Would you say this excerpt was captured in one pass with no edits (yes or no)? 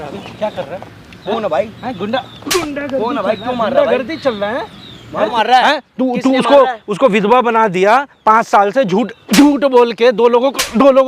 no